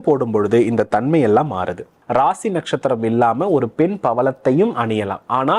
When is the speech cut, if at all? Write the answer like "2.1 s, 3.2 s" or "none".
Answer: 1.9 s